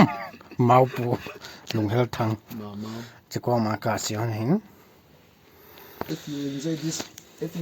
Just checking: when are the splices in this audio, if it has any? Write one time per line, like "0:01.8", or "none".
0:06.1